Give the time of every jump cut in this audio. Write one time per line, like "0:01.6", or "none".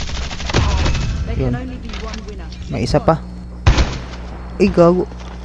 0:03.3

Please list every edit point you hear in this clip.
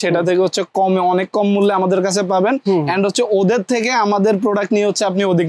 none

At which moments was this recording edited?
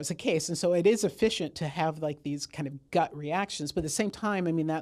none

